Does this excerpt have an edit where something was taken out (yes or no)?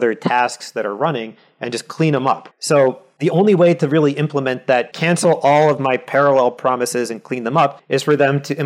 yes